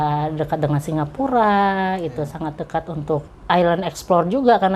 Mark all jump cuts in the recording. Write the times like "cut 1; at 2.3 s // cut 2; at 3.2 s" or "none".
cut 1; at 3.3 s